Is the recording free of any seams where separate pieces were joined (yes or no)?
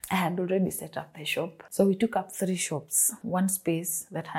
no